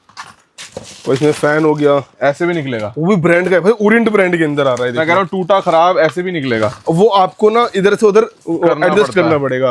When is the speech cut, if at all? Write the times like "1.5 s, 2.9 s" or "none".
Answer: none

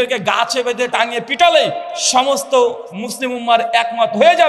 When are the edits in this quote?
0.9 s

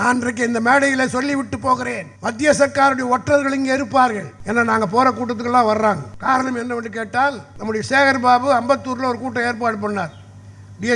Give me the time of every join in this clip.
2.1 s, 4.3 s, 6.1 s, 7.5 s

